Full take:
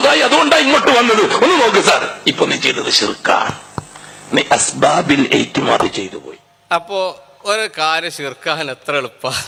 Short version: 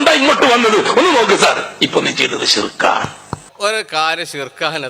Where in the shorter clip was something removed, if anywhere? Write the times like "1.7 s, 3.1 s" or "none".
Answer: 3.4 s